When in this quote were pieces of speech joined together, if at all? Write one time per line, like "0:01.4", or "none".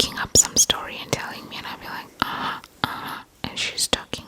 none